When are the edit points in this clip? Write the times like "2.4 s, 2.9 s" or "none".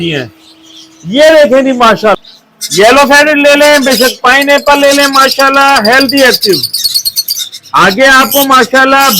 2.2 s

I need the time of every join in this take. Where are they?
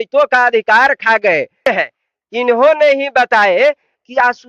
1.7 s

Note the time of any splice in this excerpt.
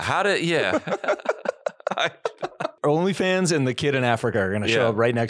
2.8 s

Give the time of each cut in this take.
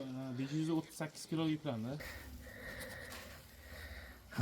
2.1 s

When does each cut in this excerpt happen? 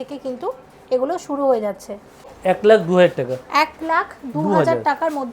2.3 s

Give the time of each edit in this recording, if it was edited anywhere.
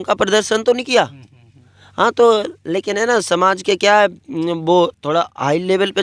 none

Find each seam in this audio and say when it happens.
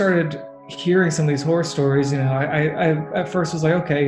none

